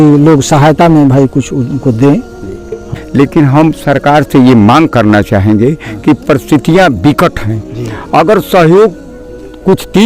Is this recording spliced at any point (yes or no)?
yes